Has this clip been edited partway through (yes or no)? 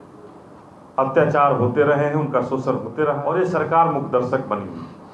yes